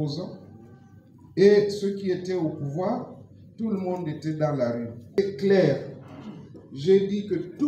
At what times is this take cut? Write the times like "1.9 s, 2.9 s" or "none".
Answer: 5.1 s